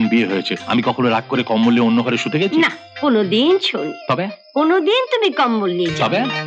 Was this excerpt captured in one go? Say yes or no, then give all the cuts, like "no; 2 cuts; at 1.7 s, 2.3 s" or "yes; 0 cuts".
yes; 0 cuts